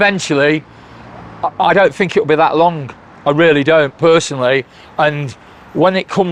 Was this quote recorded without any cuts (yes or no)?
yes